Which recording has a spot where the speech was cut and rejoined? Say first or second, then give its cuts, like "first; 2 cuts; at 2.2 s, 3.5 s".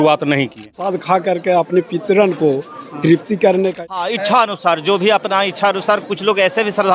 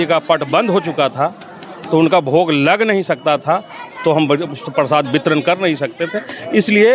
first; 2 cuts; at 0.9 s, 3.7 s